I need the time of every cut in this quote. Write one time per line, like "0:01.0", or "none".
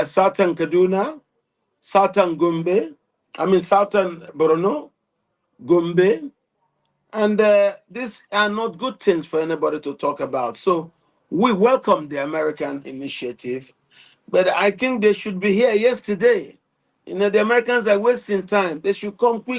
none